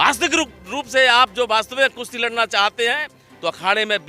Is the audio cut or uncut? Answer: uncut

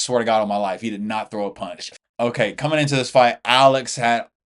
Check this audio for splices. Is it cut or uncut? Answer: cut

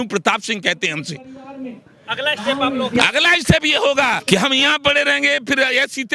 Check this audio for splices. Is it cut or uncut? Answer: cut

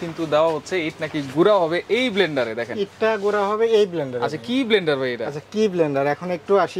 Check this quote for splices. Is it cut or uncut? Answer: uncut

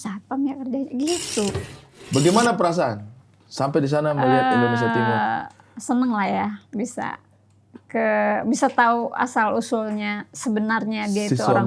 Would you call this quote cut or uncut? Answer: cut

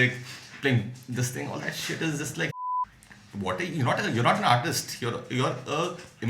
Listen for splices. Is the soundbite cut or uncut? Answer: cut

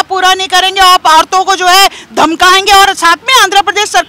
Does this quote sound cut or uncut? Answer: uncut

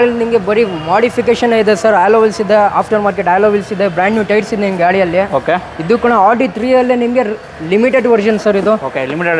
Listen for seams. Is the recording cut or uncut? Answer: uncut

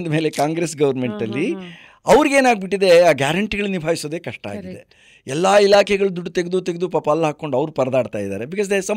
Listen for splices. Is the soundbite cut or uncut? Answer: uncut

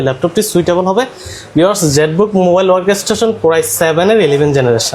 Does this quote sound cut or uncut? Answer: uncut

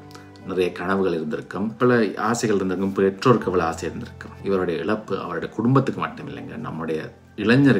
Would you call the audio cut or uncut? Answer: uncut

